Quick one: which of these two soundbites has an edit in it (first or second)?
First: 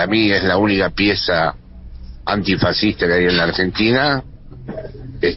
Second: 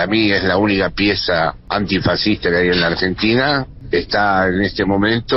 second